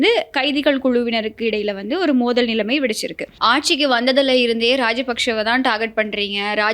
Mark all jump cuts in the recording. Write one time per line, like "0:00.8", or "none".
0:03.3